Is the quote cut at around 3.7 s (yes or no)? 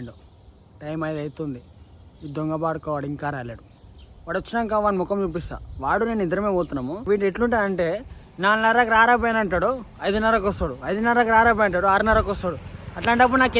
no